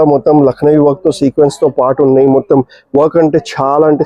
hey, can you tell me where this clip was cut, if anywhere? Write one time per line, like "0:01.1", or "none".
none